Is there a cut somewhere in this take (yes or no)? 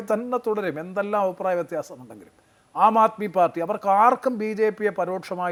no